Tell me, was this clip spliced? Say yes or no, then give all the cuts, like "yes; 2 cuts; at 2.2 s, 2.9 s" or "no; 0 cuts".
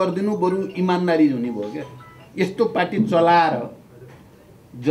no; 0 cuts